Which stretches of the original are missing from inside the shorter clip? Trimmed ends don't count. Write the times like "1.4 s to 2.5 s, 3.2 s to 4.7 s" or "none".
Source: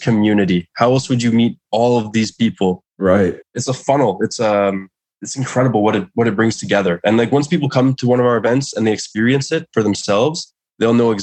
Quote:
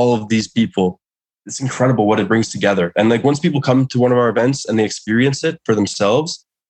2.9 s to 4.8 s, 6.0 s to 6.3 s